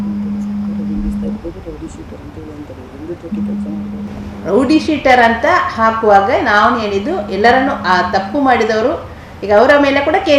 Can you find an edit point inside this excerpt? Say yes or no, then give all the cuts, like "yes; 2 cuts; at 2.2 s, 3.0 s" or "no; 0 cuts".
no; 0 cuts